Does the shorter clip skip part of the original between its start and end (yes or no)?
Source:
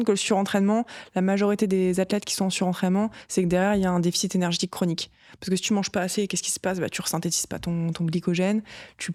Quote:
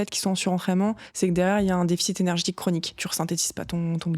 yes